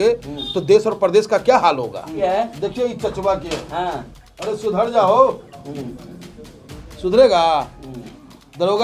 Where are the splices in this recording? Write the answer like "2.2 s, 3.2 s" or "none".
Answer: 2.2 s